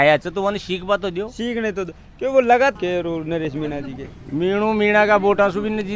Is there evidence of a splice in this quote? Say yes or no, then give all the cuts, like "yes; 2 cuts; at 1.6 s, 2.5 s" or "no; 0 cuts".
yes; 1 cut; at 2.7 s